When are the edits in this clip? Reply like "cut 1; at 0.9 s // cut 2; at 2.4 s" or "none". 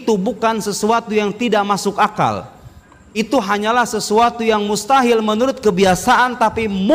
none

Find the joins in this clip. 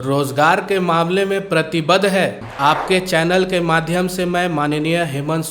cut 1; at 2.5 s

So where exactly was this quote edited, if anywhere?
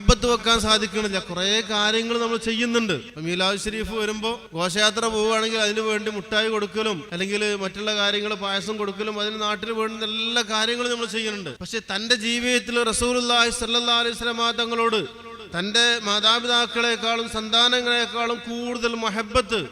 cut 1; at 3.1 s // cut 2; at 4.4 s // cut 3; at 7.1 s // cut 4; at 11.6 s

